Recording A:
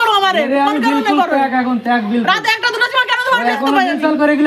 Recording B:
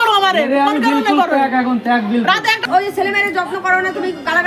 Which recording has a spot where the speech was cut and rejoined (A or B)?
B